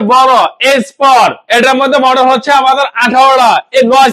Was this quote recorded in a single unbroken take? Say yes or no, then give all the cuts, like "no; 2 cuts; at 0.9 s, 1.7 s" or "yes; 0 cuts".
yes; 0 cuts